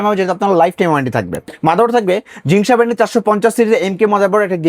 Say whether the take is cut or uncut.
cut